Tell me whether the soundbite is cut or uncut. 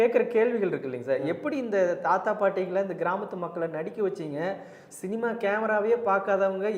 uncut